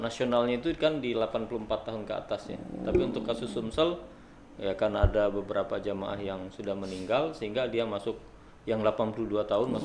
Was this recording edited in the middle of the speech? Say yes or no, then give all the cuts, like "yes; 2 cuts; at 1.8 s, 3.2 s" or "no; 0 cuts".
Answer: no; 0 cuts